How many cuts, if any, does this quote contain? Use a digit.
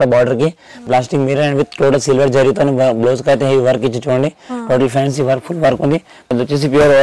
2